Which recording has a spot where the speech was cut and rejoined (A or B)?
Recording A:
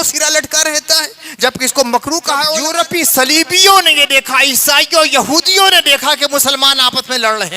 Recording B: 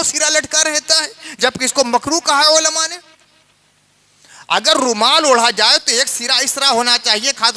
A